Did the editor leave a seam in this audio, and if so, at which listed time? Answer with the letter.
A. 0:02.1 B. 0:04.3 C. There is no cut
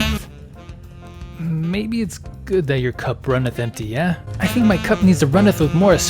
B